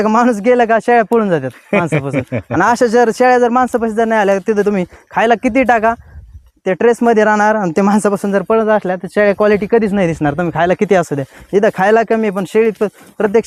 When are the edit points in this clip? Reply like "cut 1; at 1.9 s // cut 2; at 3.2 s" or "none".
none